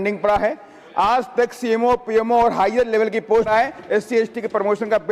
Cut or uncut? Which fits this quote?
cut